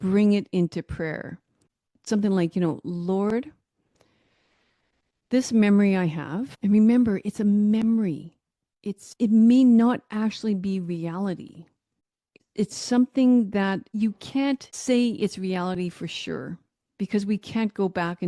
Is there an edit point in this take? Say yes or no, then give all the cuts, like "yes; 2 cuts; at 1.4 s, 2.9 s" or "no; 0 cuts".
yes; 3 cuts; at 2.0 s, 12.3 s, 13.9 s